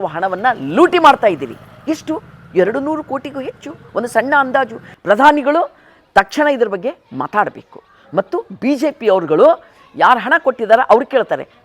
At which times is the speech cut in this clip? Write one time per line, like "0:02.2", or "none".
0:04.9